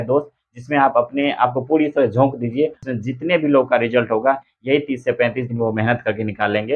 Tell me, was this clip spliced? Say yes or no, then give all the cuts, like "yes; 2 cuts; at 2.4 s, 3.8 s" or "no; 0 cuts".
yes; 1 cut; at 2.8 s